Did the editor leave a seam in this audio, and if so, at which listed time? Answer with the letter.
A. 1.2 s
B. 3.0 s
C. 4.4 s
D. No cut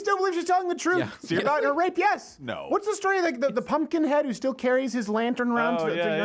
D